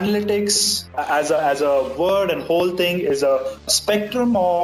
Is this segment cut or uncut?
cut